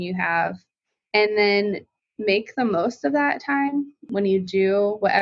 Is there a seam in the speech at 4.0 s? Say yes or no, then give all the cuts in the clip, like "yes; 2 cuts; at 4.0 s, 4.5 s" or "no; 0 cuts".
yes; 1 cut; at 4.0 s